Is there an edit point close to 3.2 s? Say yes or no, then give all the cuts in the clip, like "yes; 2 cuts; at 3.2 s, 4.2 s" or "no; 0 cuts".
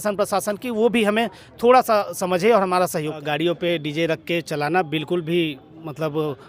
yes; 1 cut; at 3.2 s